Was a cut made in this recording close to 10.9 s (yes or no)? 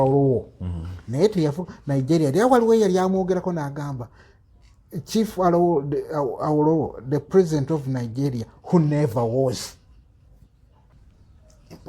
yes